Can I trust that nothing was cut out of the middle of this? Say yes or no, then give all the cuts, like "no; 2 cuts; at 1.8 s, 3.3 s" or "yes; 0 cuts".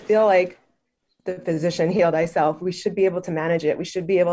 yes; 0 cuts